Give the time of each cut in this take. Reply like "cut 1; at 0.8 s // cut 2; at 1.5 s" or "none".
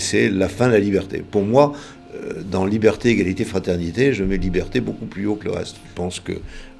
cut 1; at 5.8 s